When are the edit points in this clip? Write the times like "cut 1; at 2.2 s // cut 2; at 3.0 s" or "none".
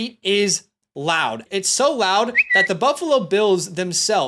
cut 1; at 1.4 s